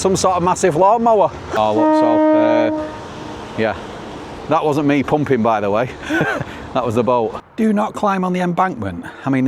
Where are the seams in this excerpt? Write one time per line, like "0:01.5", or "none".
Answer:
0:01.5
0:07.4